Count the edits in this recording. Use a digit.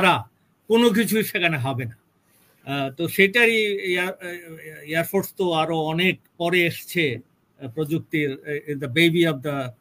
0